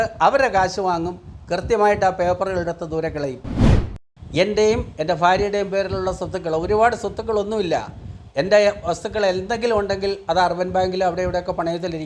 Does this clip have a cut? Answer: yes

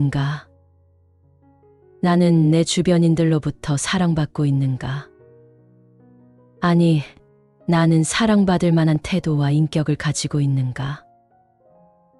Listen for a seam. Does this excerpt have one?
no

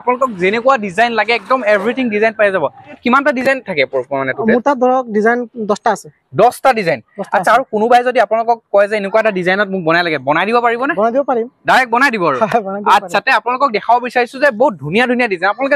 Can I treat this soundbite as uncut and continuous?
yes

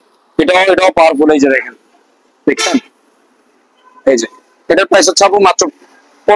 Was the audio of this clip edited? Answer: no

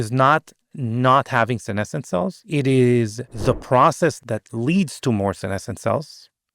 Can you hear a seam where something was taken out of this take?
yes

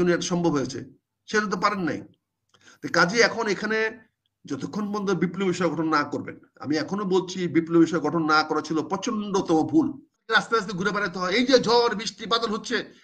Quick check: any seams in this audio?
yes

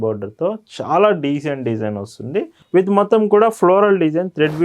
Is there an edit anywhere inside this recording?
yes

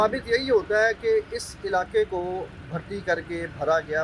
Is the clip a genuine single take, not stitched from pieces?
yes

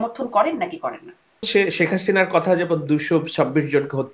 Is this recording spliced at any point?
yes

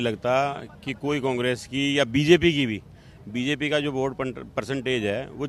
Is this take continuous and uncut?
yes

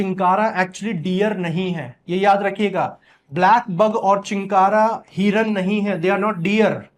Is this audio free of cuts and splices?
yes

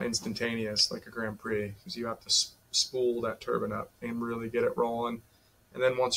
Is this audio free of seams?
yes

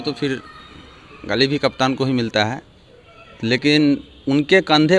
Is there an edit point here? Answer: no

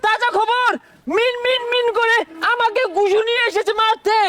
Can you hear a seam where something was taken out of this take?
no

